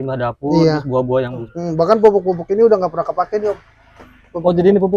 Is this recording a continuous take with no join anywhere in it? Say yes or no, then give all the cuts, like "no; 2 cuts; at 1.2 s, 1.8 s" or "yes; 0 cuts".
no; 1 cut; at 1.5 s